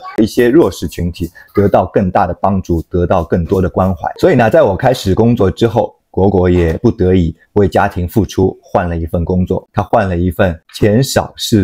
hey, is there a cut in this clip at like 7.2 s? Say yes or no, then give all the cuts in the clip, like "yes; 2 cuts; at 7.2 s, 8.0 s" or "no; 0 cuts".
no; 2 cuts; at 4.1 s, 9.6 s